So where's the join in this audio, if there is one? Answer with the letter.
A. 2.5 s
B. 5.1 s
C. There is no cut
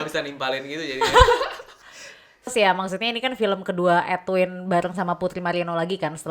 A